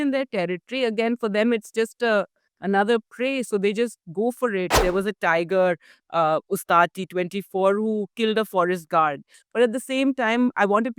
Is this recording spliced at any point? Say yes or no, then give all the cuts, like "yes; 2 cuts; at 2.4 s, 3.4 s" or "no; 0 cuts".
yes; 2 cuts; at 4.8 s, 9.3 s